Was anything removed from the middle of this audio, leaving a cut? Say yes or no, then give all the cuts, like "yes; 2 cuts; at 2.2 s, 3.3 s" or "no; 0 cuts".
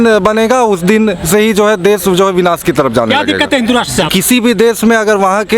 yes; 1 cut; at 4.1 s